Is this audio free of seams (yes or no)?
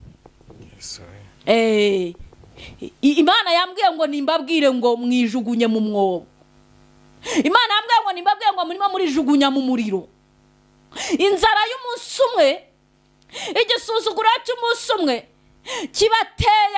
yes